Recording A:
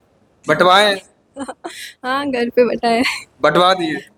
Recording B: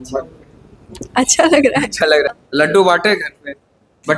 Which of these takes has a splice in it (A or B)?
B